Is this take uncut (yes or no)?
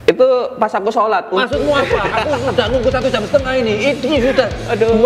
yes